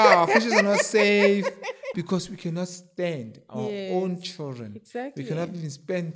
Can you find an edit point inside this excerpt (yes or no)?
yes